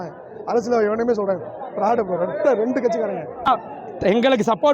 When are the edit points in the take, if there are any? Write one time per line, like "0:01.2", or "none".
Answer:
0:03.5